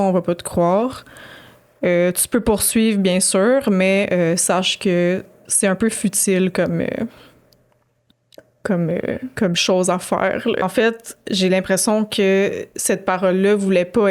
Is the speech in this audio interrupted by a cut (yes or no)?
yes